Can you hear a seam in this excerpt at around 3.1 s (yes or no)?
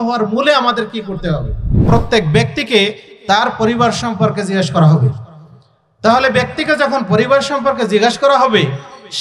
no